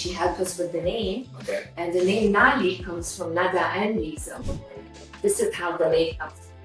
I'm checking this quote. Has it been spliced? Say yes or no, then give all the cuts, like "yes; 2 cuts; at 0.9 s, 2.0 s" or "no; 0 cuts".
no; 0 cuts